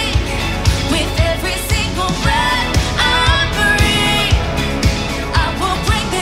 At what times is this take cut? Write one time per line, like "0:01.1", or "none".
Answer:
none